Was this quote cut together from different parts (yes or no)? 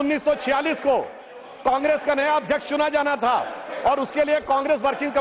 no